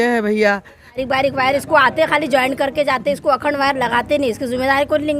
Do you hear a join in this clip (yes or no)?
yes